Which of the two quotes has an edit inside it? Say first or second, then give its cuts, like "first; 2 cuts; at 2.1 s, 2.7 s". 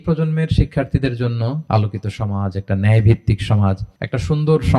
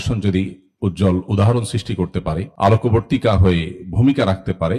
first; 1 cut; at 1.6 s